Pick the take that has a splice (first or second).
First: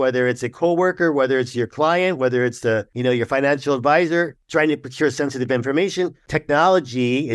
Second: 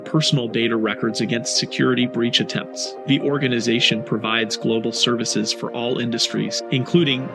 first